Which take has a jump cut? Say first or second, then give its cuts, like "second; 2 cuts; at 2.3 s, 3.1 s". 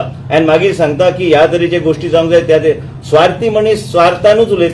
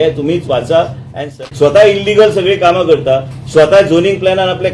second; 1 cut; at 1.3 s